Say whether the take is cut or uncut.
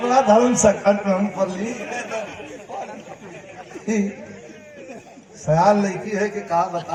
uncut